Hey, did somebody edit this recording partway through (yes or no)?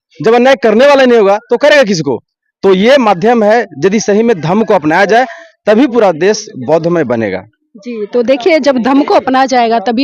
no